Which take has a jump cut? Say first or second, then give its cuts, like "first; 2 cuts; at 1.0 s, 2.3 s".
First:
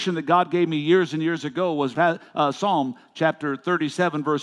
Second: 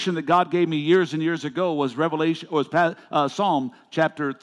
first; 1 cut; at 1.9 s